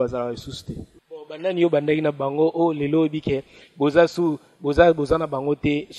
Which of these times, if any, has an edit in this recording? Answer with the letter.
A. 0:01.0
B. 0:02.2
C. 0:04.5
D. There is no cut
A